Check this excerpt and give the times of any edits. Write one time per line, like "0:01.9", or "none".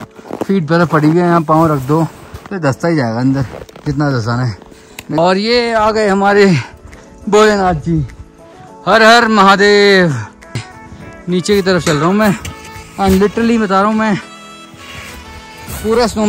0:05.2
0:10.7